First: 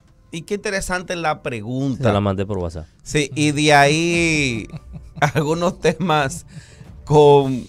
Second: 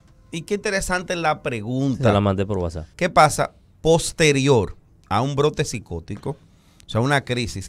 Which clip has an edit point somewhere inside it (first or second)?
second